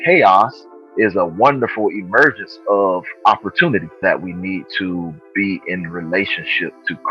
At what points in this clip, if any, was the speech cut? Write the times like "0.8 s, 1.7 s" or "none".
4.0 s